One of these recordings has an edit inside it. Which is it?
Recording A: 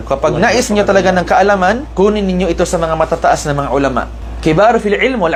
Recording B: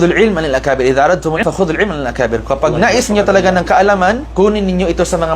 B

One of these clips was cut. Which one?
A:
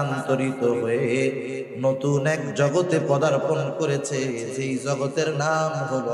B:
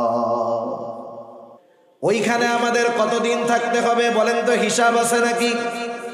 B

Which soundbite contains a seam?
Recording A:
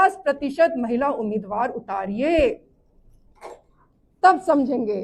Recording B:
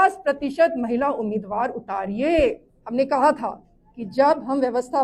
B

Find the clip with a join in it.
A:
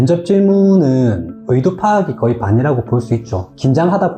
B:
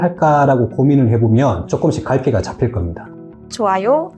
B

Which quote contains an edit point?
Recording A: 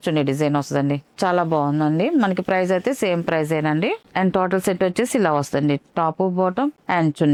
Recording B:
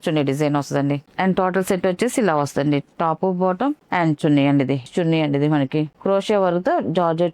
B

